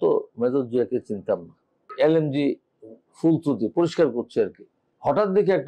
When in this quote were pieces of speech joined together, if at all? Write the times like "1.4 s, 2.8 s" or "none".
1.9 s